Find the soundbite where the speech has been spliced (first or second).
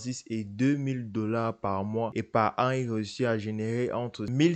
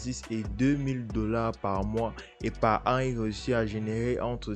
first